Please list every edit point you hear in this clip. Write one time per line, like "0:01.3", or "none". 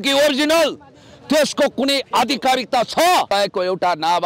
0:03.3